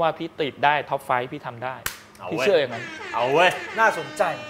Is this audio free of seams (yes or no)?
yes